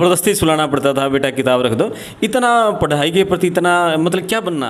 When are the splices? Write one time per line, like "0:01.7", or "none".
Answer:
none